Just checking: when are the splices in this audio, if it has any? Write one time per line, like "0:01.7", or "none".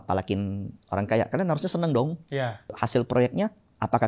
0:02.8